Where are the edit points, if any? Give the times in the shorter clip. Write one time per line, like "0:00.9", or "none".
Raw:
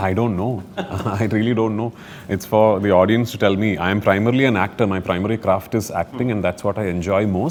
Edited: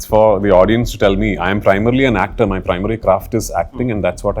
none

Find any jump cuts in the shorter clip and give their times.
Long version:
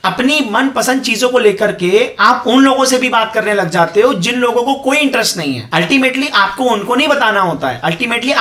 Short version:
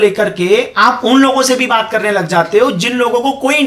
none

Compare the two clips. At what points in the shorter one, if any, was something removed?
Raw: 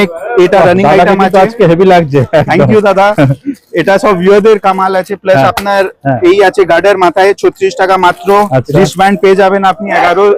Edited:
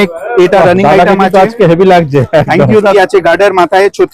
0:02.9

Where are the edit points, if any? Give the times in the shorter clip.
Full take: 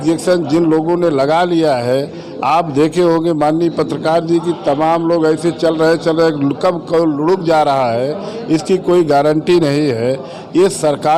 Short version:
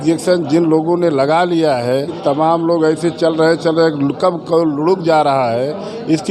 0:02.1

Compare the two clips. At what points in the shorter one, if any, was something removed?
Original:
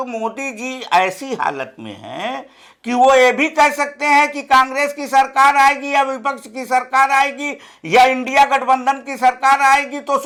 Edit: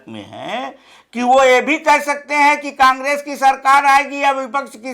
none

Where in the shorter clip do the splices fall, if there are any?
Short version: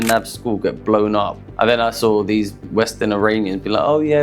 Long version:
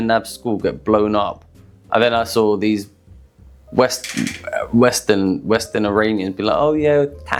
0:01.4
0:02.7

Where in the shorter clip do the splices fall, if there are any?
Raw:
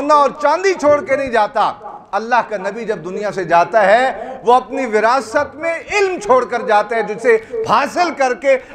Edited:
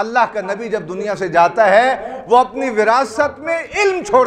none

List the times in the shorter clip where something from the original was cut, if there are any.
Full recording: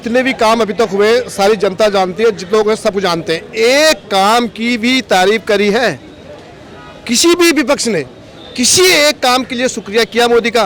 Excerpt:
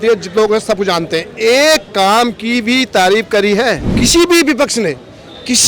0:03.9

